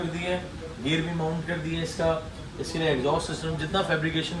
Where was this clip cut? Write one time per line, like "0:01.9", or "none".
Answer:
none